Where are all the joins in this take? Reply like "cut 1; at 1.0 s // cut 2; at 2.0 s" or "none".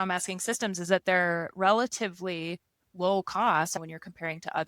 cut 1; at 3.7 s